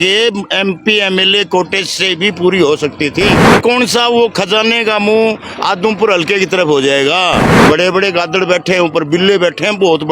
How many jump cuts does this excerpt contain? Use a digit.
2